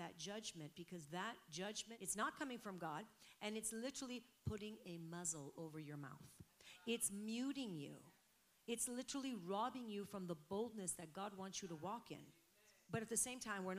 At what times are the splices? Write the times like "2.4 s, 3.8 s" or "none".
1.9 s, 12.7 s